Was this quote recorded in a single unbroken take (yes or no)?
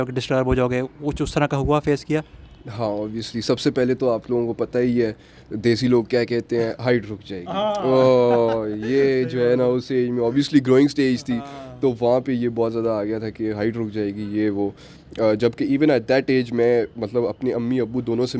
yes